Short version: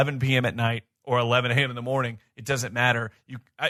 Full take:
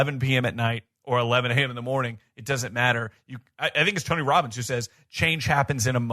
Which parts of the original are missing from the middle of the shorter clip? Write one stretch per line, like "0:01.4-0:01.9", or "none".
none